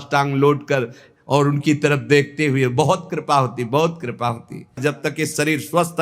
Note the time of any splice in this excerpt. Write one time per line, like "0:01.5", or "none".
0:04.8